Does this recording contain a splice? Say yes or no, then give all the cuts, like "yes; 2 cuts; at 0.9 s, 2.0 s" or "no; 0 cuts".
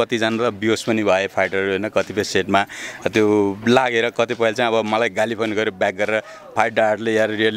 no; 0 cuts